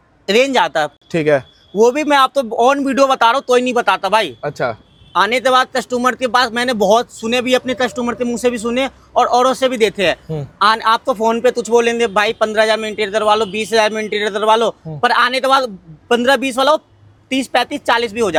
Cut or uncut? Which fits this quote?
uncut